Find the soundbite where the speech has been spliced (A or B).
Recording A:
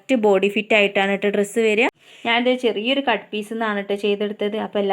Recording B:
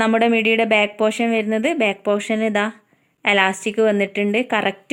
A